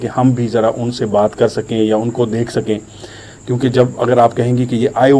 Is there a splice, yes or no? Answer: no